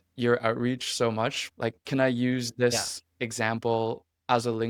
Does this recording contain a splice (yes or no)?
no